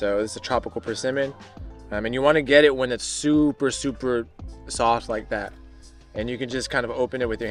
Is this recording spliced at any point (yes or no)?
no